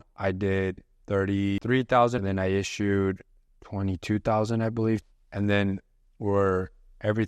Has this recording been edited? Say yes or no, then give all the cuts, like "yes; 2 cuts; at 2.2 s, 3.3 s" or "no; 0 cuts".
yes; 3 cuts; at 1.6 s, 2.2 s, 5.0 s